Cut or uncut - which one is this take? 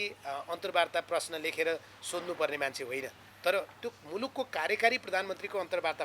uncut